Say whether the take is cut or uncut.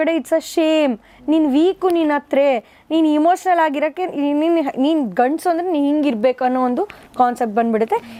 uncut